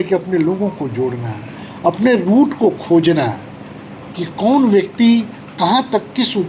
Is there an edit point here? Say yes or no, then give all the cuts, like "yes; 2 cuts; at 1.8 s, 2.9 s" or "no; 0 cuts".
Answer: no; 0 cuts